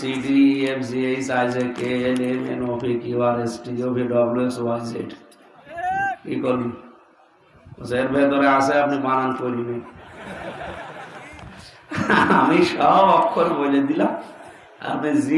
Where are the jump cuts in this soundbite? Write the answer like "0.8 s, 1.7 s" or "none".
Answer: none